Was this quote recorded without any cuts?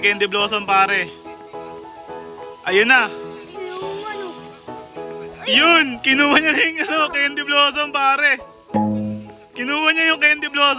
yes; 0 cuts

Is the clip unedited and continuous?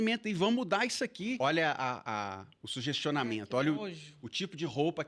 no; 1 cut; at 1.4 s

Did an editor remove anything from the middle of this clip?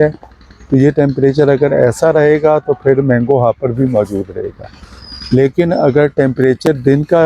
no; 0 cuts

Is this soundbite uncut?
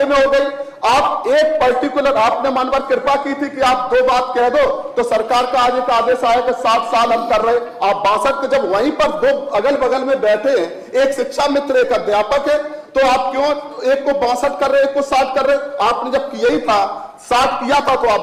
yes; 0 cuts

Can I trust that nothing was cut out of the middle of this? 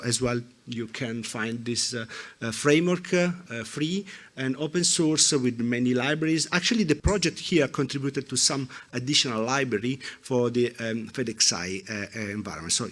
no; 2 cuts; at 3.5 s, 7.0 s

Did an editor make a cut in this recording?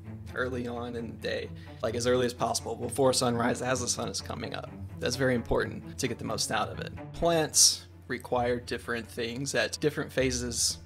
yes; 3 cuts; at 5.8 s, 7.1 s, 9.7 s

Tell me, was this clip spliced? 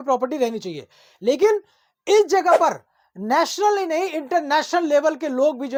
no; 0 cuts

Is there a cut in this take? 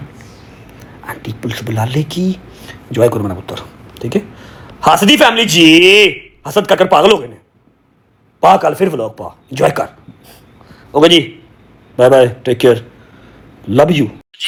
no; 0 cuts

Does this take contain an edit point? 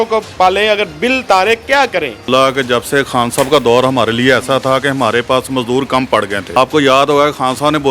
yes; 2 cuts; at 2.3 s, 6.5 s

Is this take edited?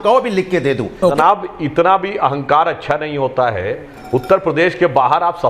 yes; 1 cut; at 1.2 s

